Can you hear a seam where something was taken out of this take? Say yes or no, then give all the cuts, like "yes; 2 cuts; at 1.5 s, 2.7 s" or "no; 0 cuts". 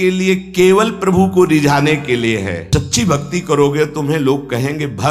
yes; 1 cut; at 2.6 s